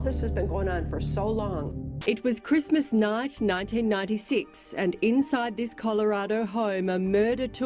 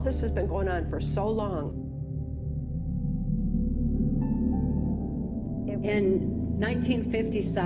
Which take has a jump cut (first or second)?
first